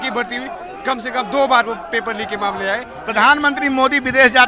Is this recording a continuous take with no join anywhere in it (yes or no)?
no